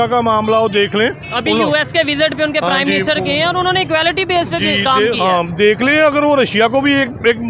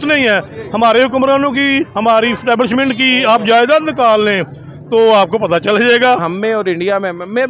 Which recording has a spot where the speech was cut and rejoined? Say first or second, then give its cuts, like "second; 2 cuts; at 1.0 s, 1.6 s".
second; 1 cut; at 6.2 s